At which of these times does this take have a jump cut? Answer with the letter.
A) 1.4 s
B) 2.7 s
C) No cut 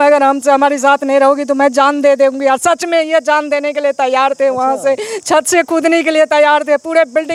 C